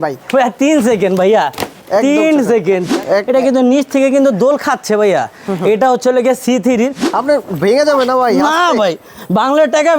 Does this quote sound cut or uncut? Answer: cut